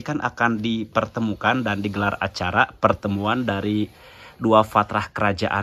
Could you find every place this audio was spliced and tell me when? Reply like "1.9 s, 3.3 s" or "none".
none